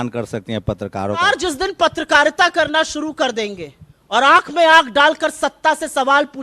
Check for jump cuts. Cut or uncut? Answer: cut